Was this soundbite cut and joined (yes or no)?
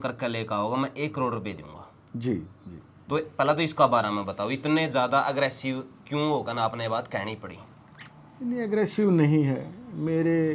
no